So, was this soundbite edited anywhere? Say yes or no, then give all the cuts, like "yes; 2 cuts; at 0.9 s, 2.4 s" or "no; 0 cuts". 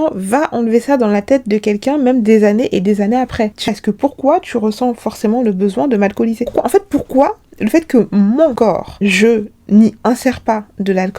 yes; 1 cut; at 3.7 s